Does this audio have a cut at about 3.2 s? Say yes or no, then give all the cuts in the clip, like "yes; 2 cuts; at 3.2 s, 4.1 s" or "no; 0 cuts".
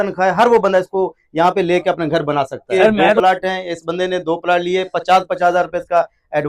yes; 1 cut; at 3.2 s